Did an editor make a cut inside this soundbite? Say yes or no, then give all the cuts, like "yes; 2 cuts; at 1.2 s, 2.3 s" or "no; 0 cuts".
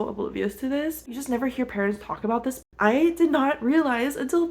yes; 2 cuts; at 1.2 s, 2.6 s